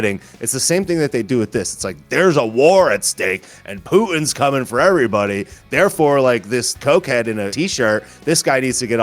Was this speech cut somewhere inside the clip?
yes; 2 cuts; at 6.7 s, 7.5 s

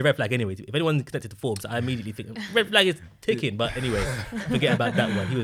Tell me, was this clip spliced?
no; 0 cuts

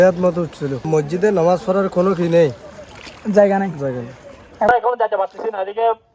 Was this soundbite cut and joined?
yes; 2 cuts; at 0.9 s, 4.7 s

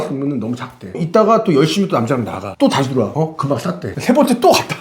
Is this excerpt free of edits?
no; 2 cuts; at 1.0 s, 2.4 s

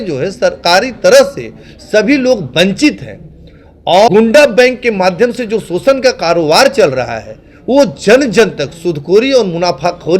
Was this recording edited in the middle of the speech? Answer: yes; 1 cut; at 4.1 s

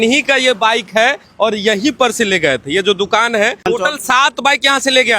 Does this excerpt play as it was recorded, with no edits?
no; 1 cut; at 3.7 s

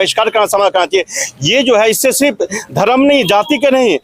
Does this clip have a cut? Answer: no; 0 cuts

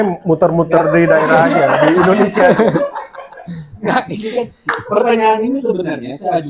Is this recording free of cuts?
yes; 0 cuts

